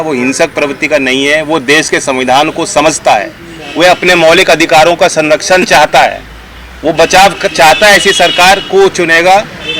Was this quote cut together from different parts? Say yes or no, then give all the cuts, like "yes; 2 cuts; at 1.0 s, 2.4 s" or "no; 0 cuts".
no; 0 cuts